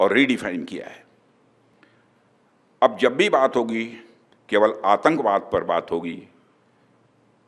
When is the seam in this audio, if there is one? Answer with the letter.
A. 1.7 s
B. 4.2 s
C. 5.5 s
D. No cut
A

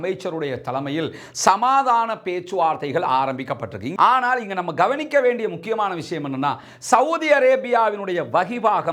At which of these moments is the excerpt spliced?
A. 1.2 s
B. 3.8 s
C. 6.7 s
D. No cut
B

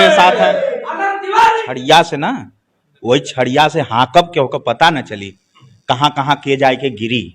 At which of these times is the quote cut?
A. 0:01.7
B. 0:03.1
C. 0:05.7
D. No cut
A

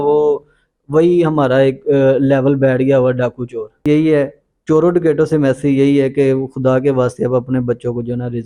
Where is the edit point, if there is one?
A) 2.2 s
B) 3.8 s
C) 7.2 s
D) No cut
B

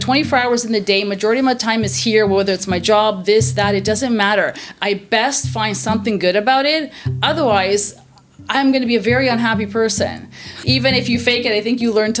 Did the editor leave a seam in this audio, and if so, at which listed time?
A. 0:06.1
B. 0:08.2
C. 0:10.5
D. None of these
C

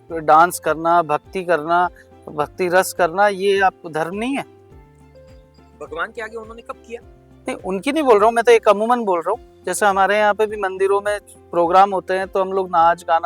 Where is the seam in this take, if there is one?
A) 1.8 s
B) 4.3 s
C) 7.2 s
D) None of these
D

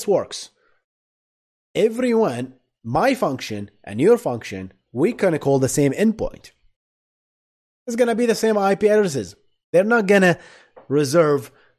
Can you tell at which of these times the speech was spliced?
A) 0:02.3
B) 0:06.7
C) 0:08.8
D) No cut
D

